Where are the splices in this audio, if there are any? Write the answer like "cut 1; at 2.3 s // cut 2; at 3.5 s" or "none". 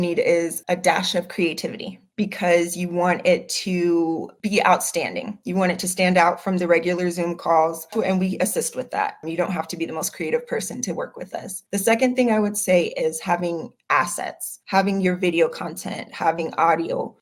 cut 1; at 7.9 s